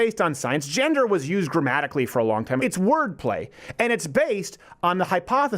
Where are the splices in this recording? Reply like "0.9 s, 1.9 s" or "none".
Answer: 2.6 s